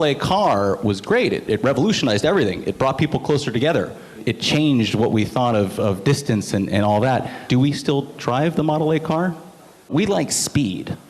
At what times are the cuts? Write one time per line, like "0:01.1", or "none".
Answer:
0:01.0
0:04.2
0:07.4
0:09.9